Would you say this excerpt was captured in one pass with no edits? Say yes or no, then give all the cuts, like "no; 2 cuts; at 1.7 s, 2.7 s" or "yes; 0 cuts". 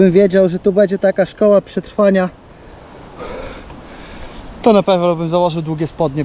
yes; 0 cuts